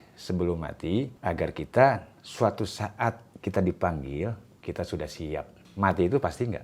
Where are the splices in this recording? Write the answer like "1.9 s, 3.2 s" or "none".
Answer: 1.1 s, 3.3 s, 4.5 s, 5.6 s